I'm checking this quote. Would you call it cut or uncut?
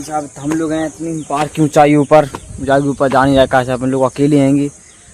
uncut